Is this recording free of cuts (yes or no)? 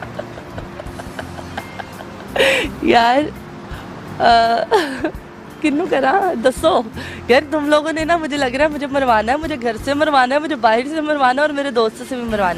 yes